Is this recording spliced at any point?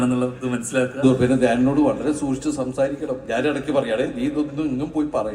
yes; 1 cut; at 1.0 s

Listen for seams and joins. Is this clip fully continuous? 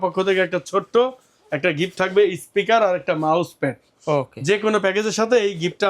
yes; 0 cuts

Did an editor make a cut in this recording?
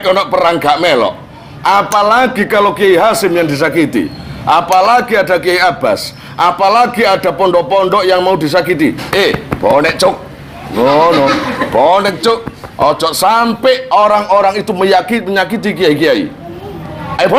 no; 0 cuts

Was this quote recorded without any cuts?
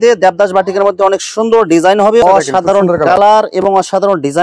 no; 1 cut; at 2.2 s

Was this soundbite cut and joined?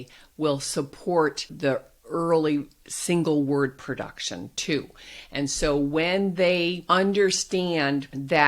yes; 1 cut; at 1.5 s

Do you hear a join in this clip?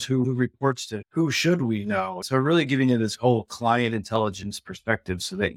yes; 1 cut; at 2.2 s

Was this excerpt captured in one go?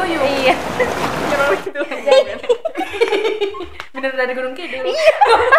yes; 0 cuts

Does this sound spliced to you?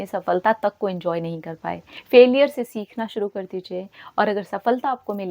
yes; 1 cut; at 1.9 s

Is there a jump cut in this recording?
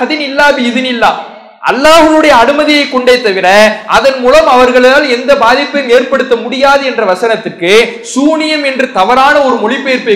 no; 0 cuts

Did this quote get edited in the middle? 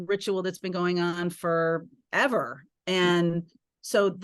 yes; 1 cut; at 2.0 s

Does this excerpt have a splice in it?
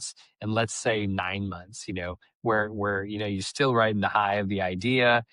no; 0 cuts

